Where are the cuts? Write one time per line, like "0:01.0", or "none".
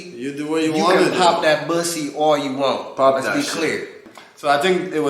0:04.0